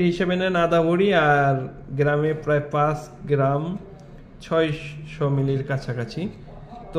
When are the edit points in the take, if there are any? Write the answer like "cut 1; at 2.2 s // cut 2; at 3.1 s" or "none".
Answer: none